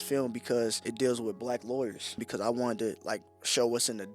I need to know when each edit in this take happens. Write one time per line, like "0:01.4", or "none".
0:00.8
0:02.2